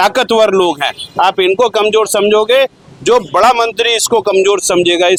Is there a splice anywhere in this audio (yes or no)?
no